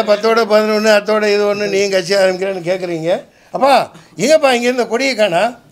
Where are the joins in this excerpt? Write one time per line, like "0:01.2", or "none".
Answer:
0:03.4